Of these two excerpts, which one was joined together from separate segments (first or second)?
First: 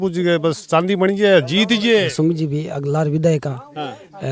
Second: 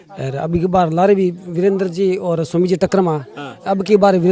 first